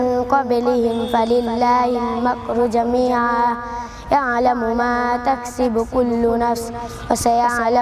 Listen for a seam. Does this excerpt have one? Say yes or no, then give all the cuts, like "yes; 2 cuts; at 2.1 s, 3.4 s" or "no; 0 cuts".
no; 0 cuts